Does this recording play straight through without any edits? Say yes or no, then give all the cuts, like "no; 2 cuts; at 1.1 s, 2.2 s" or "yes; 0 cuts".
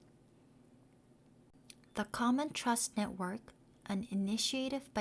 no; 1 cut; at 1.5 s